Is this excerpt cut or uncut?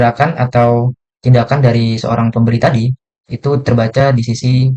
uncut